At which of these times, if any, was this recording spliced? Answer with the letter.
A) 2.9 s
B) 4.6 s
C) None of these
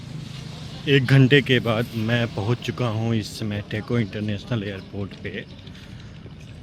C